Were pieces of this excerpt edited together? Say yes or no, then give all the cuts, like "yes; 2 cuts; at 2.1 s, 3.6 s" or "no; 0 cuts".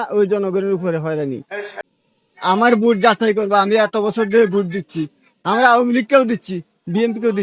yes; 1 cut; at 1.7 s